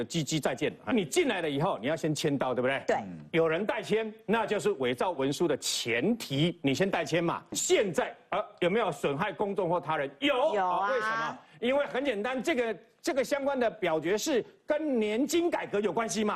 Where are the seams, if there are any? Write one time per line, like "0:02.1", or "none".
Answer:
0:00.9
0:07.5